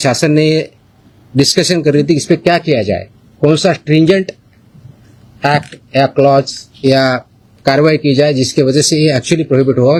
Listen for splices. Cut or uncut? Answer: uncut